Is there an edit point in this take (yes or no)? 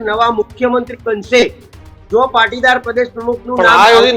no